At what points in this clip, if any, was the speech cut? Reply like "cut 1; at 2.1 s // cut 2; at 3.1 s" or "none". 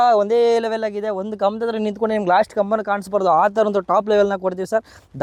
none